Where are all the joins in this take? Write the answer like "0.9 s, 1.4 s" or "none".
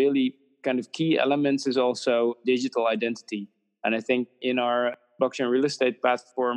2.4 s, 4.9 s